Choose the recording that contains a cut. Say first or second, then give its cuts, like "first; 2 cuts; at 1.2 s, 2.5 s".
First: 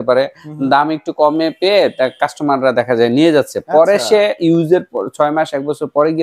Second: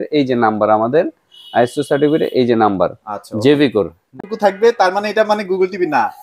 second; 1 cut; at 4.0 s